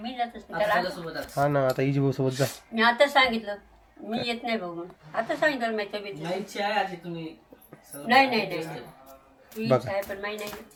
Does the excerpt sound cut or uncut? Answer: uncut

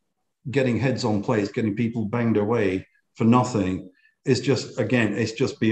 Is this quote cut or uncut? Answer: uncut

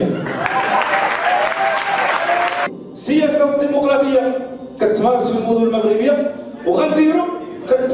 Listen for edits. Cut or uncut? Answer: cut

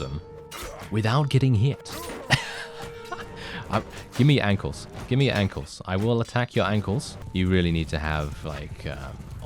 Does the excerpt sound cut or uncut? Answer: cut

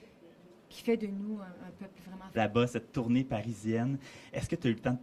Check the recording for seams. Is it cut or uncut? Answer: uncut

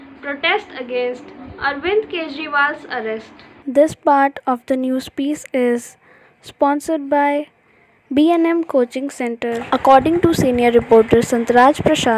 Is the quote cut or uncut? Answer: uncut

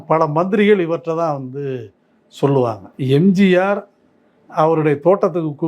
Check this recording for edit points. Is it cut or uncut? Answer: cut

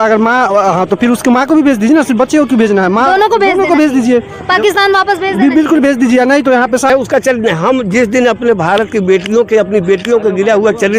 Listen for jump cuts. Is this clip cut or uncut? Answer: cut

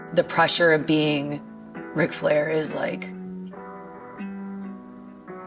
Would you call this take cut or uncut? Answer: uncut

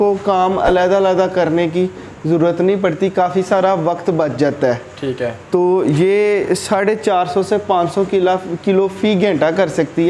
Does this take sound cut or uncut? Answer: uncut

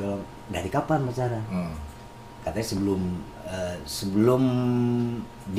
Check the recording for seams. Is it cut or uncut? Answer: uncut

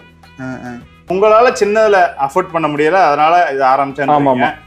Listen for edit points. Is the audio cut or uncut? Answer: cut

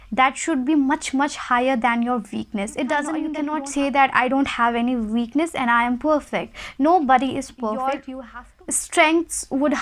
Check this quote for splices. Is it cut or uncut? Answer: cut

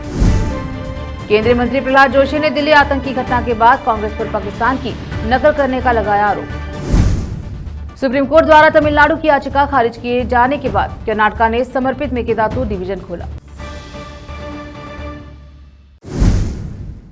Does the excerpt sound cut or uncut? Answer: cut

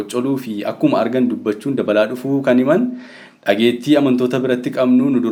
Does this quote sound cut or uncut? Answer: uncut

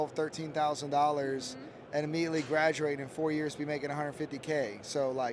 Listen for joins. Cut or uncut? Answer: uncut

